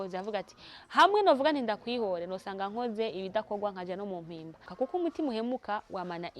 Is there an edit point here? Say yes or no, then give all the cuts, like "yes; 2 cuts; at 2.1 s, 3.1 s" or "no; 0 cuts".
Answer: yes; 1 cut; at 4.7 s